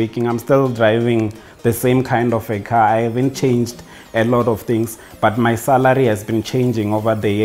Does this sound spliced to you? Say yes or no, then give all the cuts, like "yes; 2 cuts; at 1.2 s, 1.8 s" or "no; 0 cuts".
no; 0 cuts